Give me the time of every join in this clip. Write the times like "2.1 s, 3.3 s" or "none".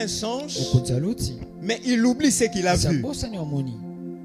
none